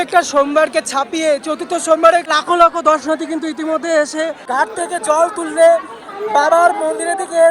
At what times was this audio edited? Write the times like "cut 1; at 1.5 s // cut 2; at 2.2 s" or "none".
cut 1; at 2.3 s // cut 2; at 4.4 s